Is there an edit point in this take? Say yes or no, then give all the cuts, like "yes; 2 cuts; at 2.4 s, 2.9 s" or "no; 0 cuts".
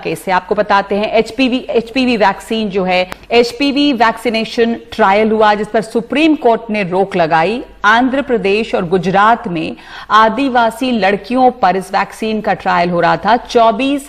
yes; 1 cut; at 3.2 s